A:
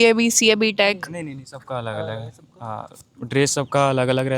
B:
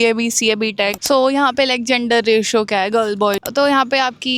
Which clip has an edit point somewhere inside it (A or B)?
B